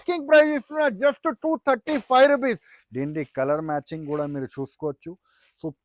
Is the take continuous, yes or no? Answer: no